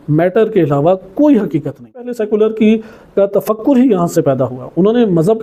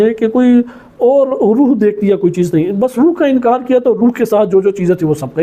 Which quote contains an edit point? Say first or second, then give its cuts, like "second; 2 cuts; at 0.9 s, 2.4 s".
first; 1 cut; at 2.2 s